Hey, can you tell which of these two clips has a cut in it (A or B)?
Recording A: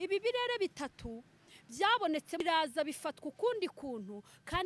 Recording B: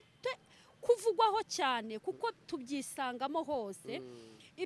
A